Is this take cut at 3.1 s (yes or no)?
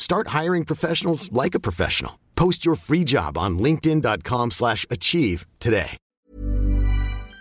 no